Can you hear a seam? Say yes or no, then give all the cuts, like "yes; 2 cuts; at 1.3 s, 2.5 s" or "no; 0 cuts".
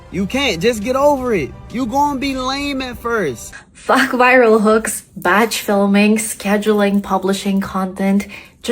yes; 1 cut; at 3.5 s